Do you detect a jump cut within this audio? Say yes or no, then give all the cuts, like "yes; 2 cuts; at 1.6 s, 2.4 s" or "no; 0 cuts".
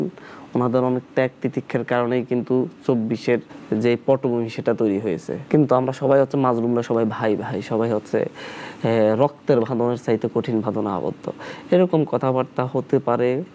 yes; 2 cuts; at 3.5 s, 5.3 s